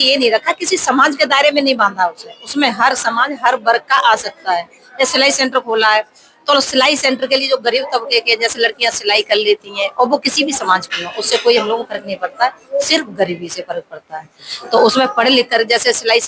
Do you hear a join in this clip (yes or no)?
no